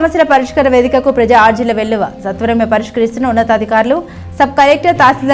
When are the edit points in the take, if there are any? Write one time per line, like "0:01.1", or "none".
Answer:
none

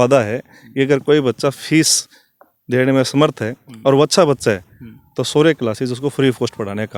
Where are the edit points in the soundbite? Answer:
none

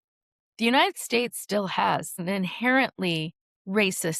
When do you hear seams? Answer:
0:02.2

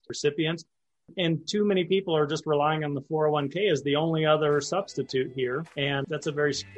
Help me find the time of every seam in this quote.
0:05.7

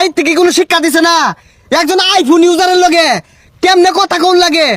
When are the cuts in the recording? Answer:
none

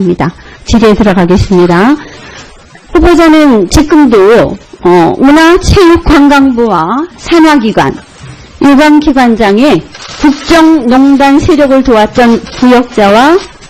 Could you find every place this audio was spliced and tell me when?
0:11.3

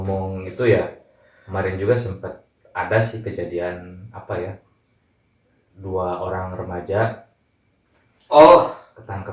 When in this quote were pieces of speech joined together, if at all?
none

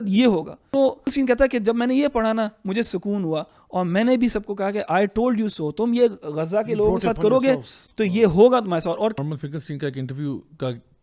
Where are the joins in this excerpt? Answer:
0:01.1
0:09.1

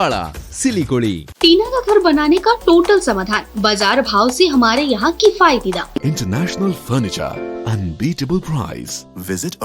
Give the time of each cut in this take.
0:01.3
0:06.0

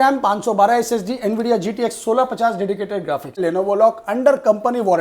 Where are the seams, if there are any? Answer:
0:03.4

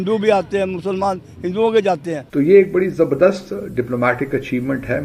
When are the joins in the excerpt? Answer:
0:02.2

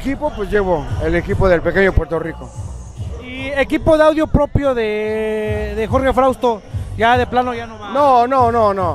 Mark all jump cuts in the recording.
none

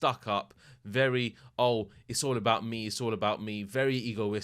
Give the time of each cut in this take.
none

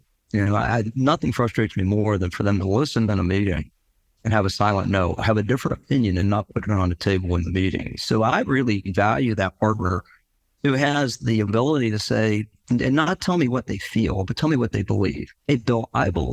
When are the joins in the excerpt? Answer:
0:12.6

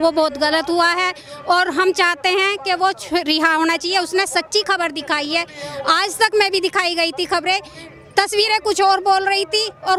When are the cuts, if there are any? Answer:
none

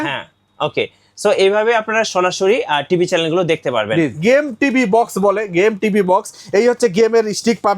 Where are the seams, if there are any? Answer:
0:04.1

